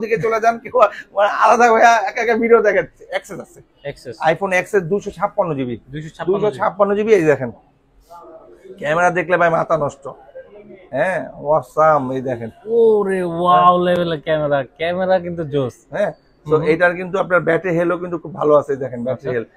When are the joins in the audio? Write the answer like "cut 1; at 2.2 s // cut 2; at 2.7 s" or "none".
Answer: cut 1; at 3.0 s